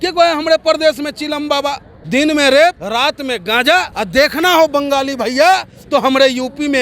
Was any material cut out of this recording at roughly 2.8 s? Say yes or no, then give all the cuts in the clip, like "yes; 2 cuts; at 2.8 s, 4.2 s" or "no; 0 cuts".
yes; 3 cuts; at 1.9 s, 2.8 s, 3.9 s